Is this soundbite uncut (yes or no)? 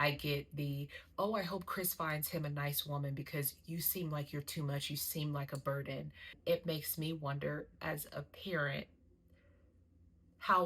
no